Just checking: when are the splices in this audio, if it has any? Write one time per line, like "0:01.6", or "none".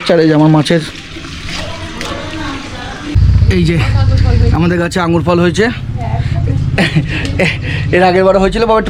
0:03.2